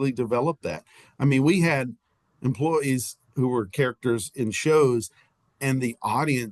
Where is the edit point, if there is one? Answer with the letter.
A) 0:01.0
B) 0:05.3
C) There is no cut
C